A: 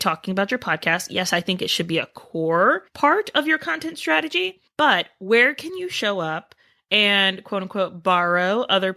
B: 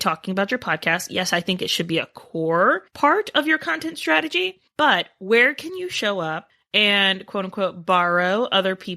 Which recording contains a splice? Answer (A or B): B